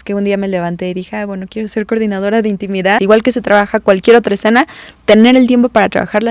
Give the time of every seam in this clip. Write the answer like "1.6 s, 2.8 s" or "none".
3.0 s